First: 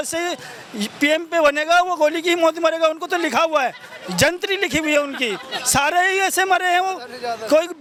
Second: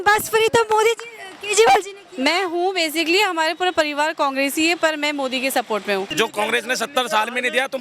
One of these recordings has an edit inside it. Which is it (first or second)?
second